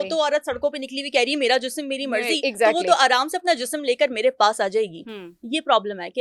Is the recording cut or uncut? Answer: uncut